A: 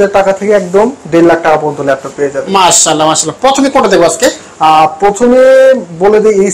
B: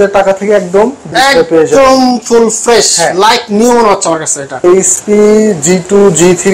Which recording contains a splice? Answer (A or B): B